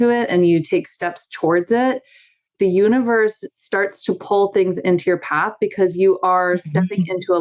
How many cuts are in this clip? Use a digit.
1